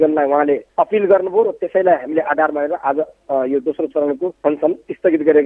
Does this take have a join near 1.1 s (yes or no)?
no